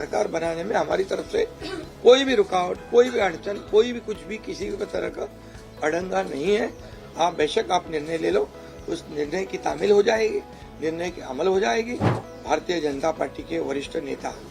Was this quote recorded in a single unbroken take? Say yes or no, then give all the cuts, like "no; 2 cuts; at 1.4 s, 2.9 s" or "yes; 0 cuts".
no; 1 cut; at 12.1 s